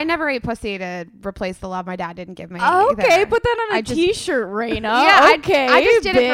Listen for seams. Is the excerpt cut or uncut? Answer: uncut